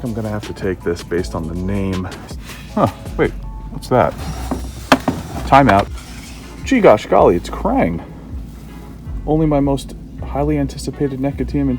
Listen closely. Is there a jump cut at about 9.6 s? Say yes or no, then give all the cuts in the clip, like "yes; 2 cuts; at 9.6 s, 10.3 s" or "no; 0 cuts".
no; 2 cuts; at 2.2 s, 6.0 s